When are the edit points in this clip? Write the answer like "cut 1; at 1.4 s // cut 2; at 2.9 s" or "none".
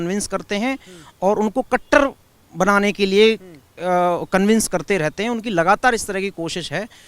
none